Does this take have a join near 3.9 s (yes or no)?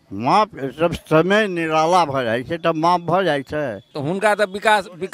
yes